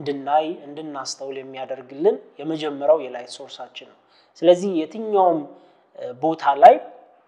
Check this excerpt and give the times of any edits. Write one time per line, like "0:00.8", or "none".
none